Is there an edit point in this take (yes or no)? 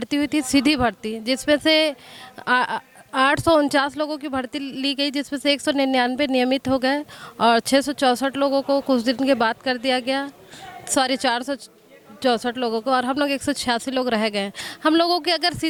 no